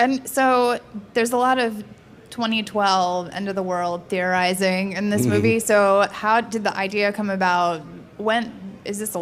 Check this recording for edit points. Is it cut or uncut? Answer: uncut